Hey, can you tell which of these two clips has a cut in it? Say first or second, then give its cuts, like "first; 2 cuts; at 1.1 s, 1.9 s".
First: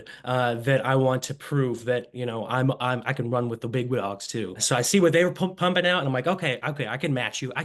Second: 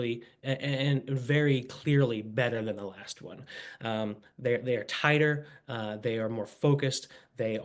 first; 1 cut; at 4.6 s